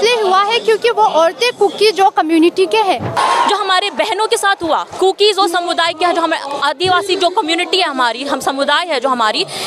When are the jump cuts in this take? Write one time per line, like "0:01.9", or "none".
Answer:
0:03.1